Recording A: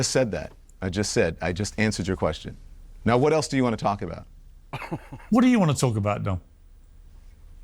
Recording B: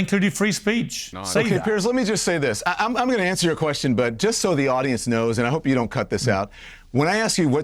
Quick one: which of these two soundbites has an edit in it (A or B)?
B